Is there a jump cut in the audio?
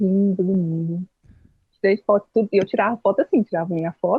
no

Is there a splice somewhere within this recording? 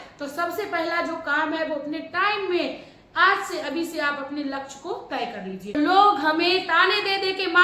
yes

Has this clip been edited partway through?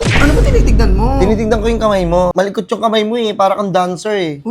yes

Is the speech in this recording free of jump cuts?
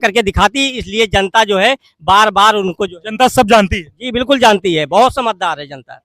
yes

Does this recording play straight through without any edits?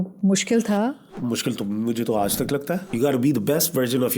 no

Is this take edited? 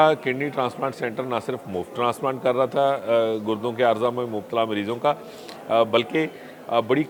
no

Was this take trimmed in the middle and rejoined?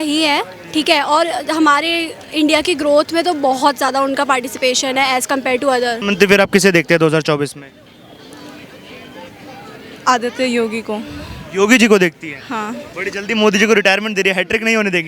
yes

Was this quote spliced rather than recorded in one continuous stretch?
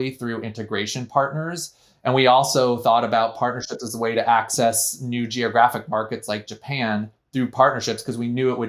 no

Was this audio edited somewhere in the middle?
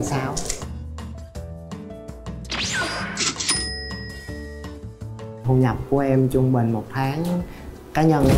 yes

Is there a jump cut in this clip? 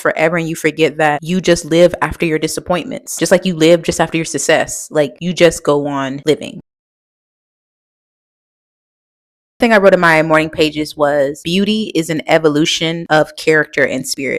no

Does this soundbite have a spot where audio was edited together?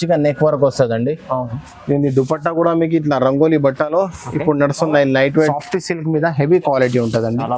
yes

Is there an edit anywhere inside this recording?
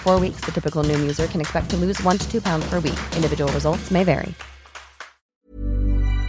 yes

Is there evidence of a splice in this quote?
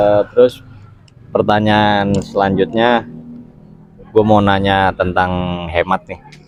no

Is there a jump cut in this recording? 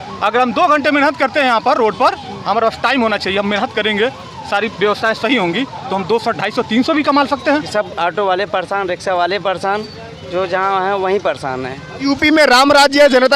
yes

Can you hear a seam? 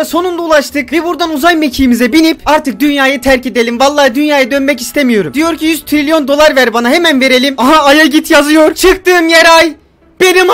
no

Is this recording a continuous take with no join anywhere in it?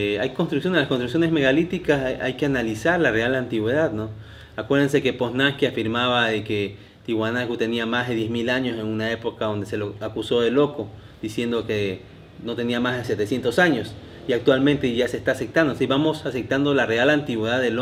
yes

